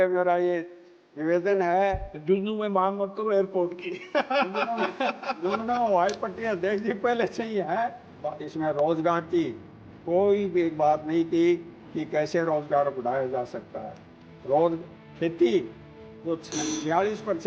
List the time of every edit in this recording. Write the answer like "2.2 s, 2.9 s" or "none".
8.1 s